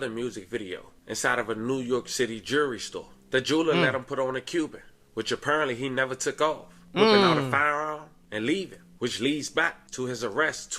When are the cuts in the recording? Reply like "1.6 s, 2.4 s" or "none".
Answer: none